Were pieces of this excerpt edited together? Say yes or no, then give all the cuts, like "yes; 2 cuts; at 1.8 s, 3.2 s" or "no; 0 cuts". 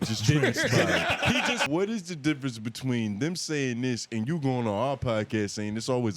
yes; 1 cut; at 1.6 s